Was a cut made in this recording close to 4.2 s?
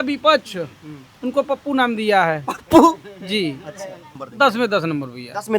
yes; 1 cut; at 4.2 s

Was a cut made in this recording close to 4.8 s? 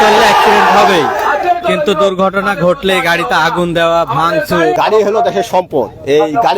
yes; 1 cut; at 4.8 s

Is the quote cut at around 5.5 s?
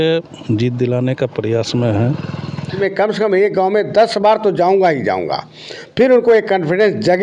no; 1 cut; at 2.8 s

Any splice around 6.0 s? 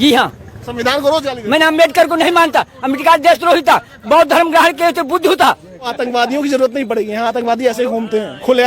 yes; 1 cut; at 6.0 s

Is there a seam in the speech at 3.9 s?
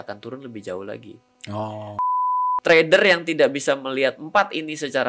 no; 1 cut; at 2.1 s

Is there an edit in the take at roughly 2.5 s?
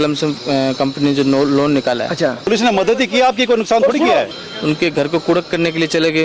yes; 2 cuts; at 2.5 s, 4.3 s

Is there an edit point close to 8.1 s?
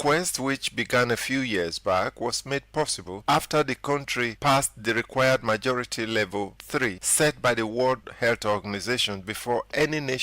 yes; 4 cuts; at 3.1 s, 4.3 s, 6.6 s, 8.1 s

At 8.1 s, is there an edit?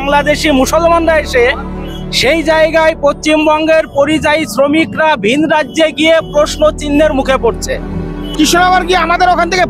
yes; 1 cut; at 8.1 s

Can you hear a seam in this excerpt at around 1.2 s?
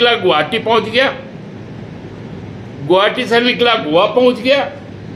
no; 0 cuts

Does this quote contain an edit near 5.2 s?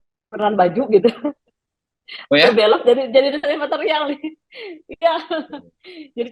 no; 0 cuts

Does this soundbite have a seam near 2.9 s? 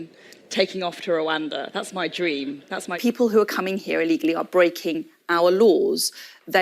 yes; 1 cut; at 2.9 s

